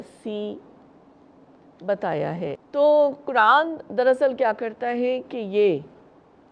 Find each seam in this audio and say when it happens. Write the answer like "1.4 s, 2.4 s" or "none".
2.6 s